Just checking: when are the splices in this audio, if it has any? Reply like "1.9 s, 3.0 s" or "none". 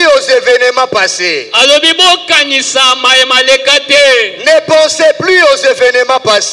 none